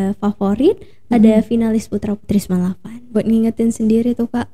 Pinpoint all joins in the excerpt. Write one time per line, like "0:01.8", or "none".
0:03.2

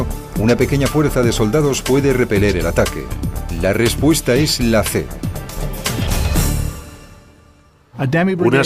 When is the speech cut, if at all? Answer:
0:02.7

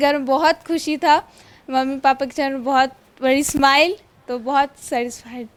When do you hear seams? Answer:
none

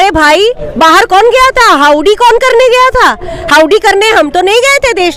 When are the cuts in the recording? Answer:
none

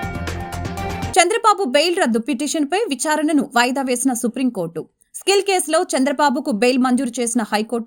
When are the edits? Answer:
none

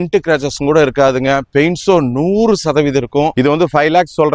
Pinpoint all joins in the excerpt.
0:03.3

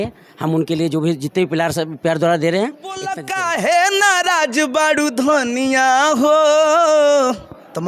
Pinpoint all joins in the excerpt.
0:03.2

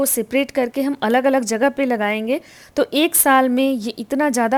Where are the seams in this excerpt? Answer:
none

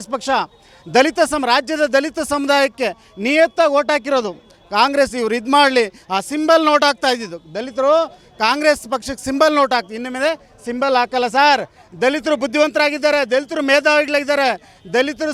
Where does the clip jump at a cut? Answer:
none

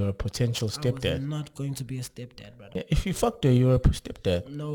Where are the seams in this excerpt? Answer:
0:02.7

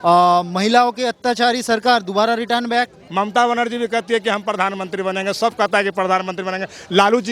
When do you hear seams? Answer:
0:03.0

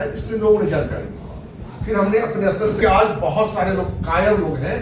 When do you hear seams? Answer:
0:02.8

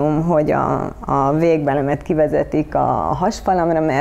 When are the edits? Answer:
none

